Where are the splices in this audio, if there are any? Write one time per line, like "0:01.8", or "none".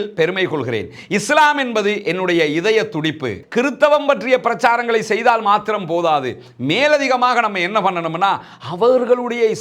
0:03.3